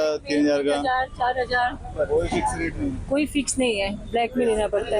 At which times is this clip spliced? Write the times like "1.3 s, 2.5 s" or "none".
none